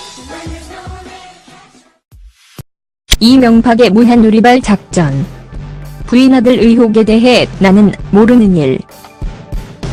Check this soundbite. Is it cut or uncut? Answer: uncut